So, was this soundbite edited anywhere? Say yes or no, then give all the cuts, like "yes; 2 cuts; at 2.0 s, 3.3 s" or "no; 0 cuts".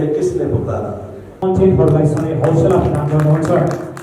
yes; 1 cut; at 1.4 s